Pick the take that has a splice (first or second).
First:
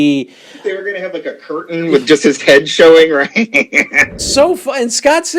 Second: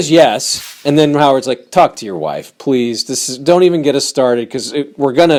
first